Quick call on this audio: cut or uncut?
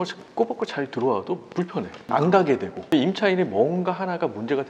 cut